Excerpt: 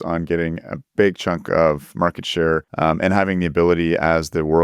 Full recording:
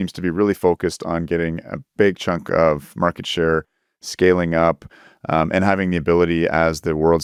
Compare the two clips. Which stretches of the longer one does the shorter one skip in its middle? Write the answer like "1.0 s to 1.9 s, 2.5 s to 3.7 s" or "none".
3.7 s to 5.2 s